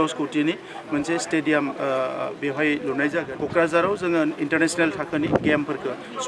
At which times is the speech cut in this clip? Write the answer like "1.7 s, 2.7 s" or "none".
3.3 s